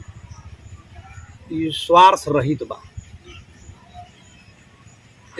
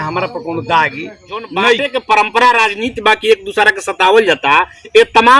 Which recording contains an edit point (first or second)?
second